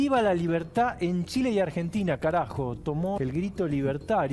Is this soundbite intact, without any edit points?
no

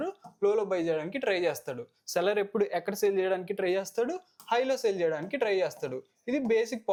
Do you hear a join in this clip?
no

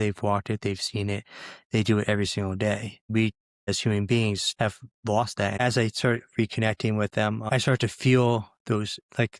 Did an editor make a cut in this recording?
yes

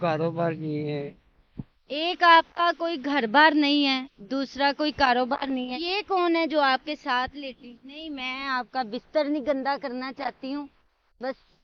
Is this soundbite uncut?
yes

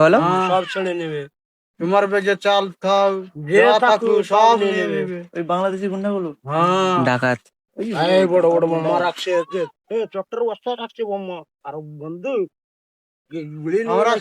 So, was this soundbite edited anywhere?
no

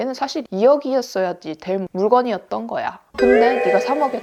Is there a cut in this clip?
no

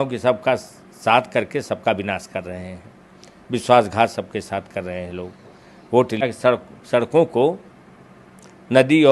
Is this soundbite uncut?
no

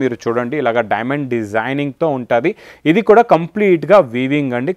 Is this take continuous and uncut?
yes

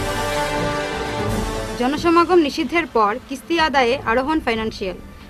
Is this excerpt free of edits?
no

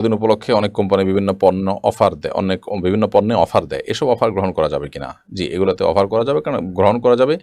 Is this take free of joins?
yes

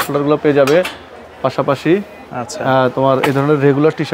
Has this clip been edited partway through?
no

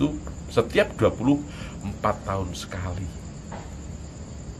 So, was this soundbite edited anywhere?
no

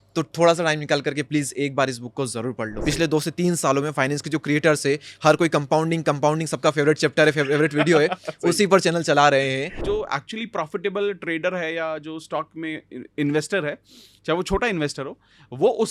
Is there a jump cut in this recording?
yes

